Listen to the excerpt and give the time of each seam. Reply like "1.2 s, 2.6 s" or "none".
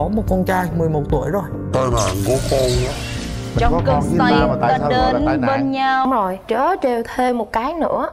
6.1 s